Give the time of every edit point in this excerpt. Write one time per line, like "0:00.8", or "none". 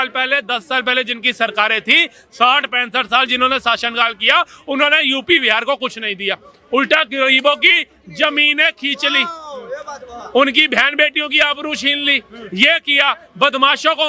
none